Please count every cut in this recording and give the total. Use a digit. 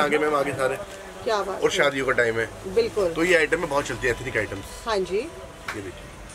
0